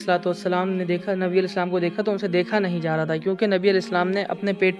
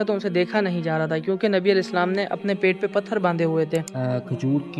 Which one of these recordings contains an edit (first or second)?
second